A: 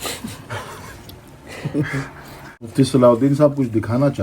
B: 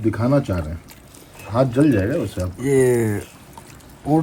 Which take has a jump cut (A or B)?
A